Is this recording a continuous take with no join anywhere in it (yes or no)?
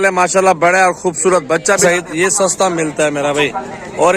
no